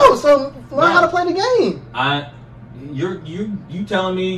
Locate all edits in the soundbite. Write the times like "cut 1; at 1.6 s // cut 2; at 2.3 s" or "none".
none